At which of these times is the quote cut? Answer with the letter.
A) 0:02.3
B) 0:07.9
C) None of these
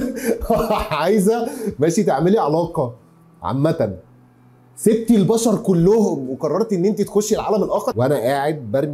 B